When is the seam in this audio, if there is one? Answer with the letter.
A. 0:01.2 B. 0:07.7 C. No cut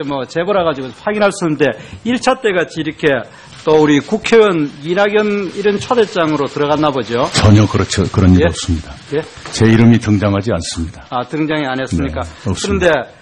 A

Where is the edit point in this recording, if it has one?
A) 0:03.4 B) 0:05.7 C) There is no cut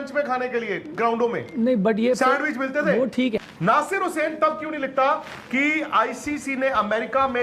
A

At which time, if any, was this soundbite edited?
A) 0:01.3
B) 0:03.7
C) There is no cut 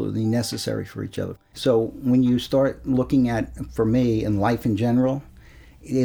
A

